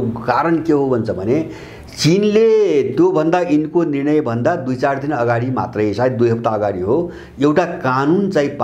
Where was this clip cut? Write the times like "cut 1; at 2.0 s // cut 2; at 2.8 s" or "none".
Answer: none